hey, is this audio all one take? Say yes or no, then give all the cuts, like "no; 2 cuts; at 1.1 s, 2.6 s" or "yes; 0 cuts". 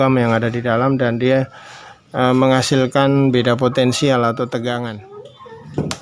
no; 1 cut; at 5.0 s